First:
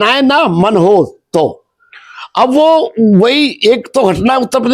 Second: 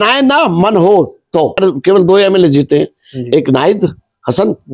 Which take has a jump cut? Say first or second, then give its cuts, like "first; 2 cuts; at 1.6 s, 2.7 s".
second; 1 cut; at 1.6 s